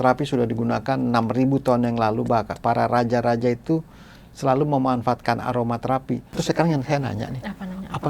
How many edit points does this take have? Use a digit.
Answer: 1